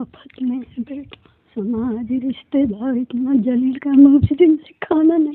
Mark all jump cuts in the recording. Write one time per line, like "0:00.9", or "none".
0:01.4